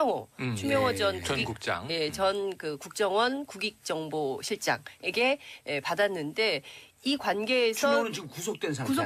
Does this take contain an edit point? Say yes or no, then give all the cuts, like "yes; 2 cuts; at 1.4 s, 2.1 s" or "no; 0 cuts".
no; 0 cuts